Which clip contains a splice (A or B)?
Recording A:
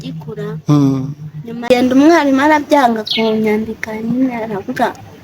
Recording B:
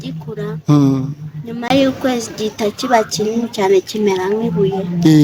A